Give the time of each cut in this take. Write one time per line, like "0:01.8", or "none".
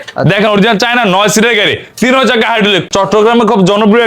0:02.9